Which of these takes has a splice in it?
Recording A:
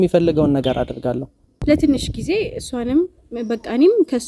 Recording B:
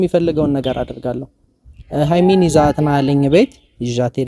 A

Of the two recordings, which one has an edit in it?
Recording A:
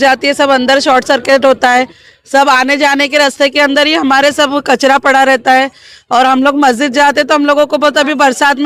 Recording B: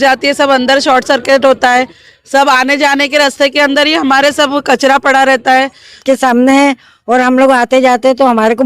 B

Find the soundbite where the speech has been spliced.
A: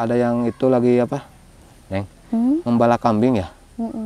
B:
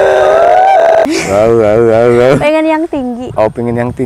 B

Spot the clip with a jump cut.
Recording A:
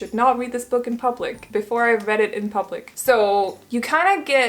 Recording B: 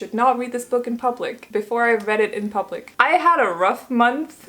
B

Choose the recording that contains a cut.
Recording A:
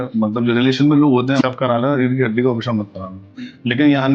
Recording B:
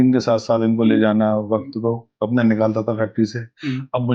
A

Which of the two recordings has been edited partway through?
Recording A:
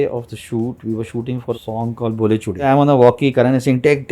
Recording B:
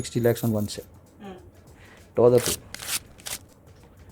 A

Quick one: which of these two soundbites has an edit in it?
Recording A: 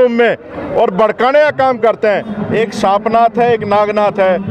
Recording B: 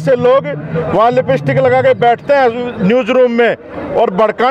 A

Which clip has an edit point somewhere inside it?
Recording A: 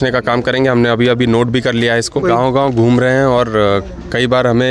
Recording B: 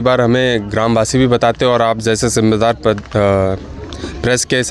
A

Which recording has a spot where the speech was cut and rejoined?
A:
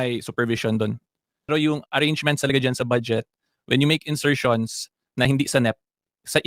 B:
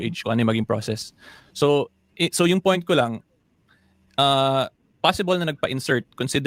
A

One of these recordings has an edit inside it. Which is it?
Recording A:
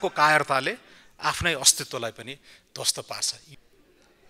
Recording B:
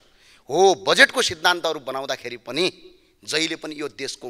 A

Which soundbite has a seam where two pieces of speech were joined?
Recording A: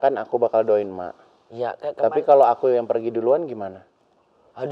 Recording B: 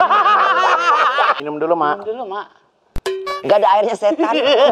B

